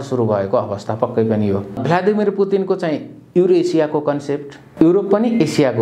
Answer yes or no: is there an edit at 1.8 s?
yes